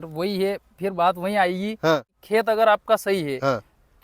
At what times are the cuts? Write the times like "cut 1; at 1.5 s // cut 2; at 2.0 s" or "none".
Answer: cut 1; at 2.1 s